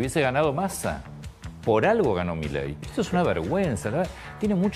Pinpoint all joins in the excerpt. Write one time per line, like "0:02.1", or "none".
0:02.8